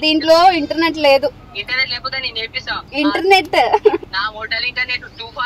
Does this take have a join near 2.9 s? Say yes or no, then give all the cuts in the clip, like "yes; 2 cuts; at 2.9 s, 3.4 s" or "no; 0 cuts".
yes; 3 cuts; at 1.4 s, 2.9 s, 4.1 s